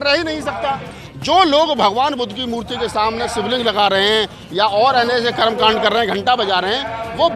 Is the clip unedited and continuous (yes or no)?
no